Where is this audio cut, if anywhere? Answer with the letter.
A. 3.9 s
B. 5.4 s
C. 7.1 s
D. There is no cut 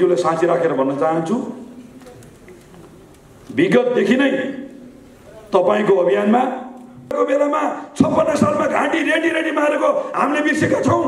C